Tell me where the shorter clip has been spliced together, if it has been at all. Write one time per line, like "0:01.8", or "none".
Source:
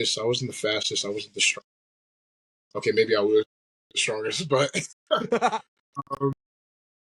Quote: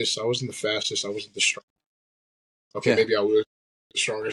none